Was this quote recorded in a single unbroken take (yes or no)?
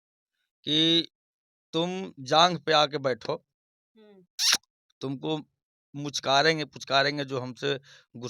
yes